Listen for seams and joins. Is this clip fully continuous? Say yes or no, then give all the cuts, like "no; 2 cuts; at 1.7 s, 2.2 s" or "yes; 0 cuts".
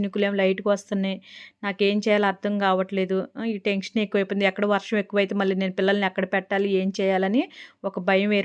yes; 0 cuts